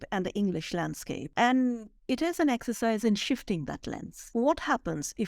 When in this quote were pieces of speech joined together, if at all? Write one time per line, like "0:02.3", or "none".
0:01.2
0:04.1